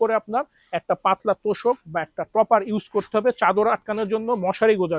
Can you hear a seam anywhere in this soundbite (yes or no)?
no